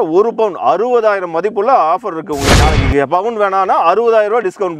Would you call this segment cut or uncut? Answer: cut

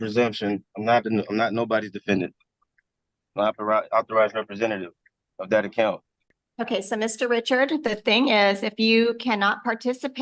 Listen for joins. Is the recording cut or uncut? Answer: uncut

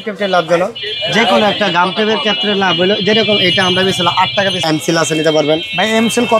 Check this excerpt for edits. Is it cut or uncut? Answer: cut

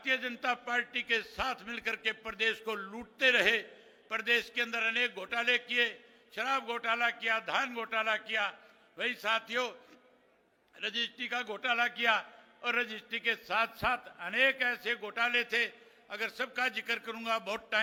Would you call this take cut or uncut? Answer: uncut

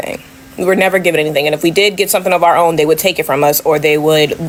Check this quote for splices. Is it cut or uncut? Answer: uncut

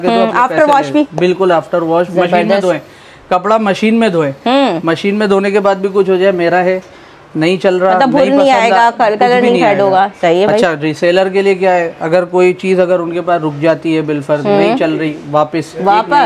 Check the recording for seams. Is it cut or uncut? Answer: uncut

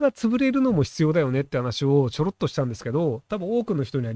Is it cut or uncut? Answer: uncut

